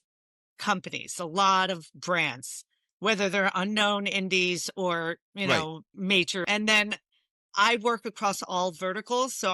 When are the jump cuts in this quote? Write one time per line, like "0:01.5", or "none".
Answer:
0:06.4